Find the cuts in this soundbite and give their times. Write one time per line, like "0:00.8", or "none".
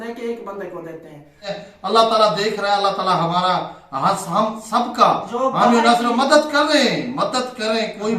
0:01.5